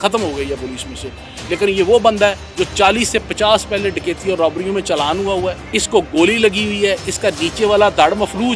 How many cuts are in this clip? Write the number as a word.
two